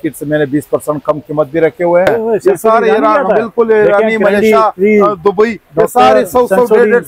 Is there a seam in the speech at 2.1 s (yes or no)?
yes